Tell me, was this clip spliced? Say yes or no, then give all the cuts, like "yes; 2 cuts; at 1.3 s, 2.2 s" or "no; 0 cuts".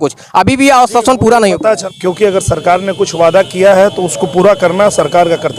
yes; 1 cut; at 1.8 s